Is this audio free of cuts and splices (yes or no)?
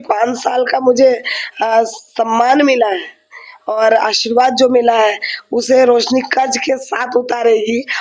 yes